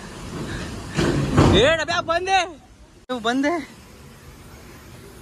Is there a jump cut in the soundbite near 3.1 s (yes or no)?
yes